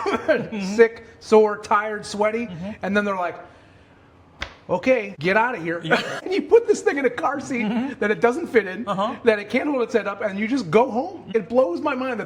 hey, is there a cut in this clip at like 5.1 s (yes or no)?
yes